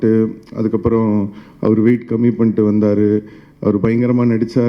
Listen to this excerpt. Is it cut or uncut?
uncut